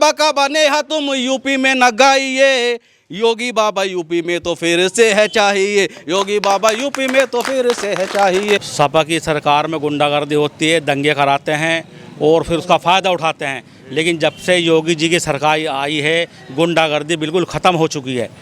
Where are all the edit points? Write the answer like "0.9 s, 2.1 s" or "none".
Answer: 8.7 s